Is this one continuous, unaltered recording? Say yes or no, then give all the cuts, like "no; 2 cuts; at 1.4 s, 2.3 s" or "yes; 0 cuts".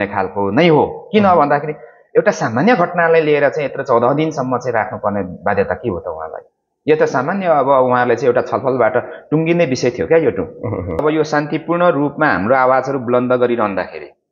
no; 1 cut; at 11.0 s